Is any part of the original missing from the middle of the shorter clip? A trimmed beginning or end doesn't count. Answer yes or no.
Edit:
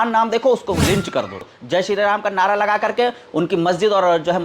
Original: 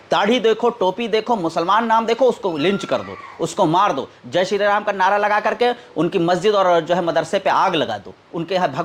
yes